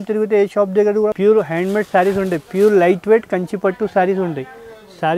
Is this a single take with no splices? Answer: no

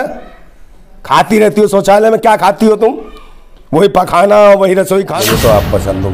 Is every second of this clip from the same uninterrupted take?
no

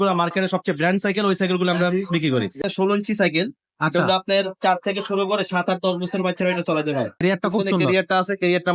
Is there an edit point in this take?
yes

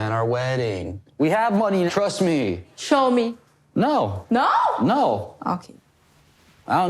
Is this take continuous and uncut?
no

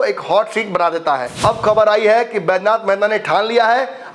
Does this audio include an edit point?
yes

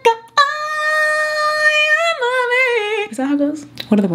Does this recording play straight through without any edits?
yes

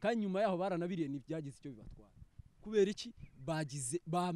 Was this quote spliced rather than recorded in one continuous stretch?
no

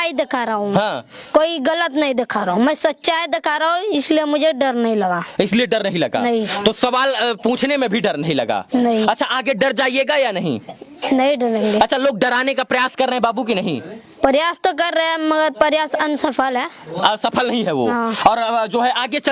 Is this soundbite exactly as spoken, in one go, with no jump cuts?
yes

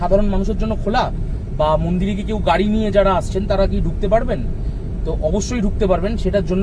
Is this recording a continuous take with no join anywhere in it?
yes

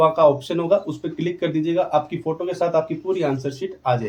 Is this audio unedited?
yes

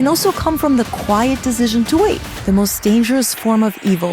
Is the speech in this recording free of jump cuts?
no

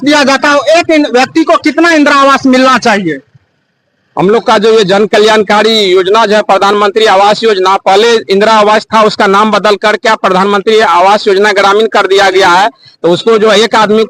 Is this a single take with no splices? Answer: yes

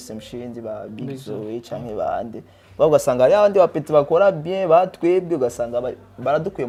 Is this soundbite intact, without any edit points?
yes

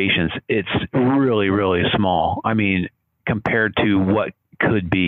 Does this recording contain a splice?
no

